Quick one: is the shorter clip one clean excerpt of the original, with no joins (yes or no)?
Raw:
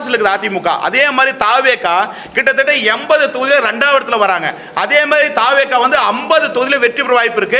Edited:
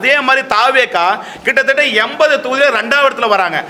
yes